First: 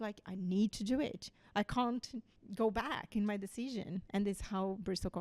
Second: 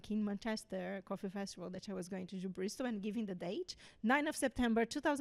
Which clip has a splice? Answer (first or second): first